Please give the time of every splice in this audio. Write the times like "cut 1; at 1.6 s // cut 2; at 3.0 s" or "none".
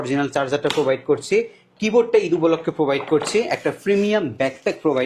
none